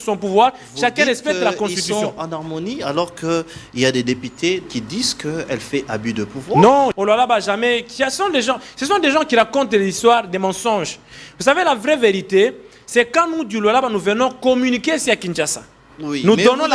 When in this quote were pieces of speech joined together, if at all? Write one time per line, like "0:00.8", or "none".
0:04.6
0:06.9